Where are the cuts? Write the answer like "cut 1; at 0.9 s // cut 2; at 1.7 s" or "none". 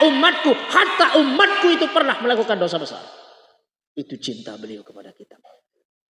none